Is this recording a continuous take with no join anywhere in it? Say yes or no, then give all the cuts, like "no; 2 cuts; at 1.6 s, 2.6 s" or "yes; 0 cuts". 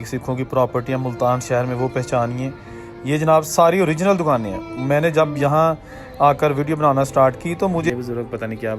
no; 1 cut; at 7.9 s